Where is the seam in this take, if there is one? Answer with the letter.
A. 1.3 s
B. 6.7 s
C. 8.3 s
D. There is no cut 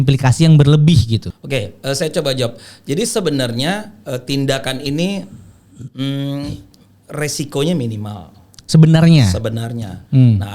A